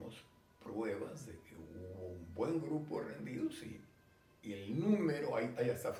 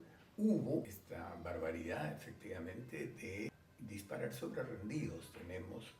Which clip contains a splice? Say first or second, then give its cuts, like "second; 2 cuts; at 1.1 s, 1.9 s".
second; 2 cuts; at 1.0 s, 3.6 s